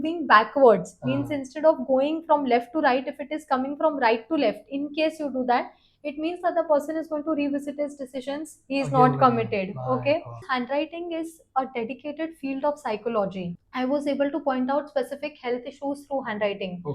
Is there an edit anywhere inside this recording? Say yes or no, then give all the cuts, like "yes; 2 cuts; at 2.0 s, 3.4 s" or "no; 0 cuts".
yes; 2 cuts; at 10.4 s, 13.6 s